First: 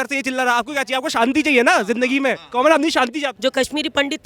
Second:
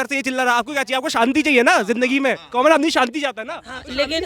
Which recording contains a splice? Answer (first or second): first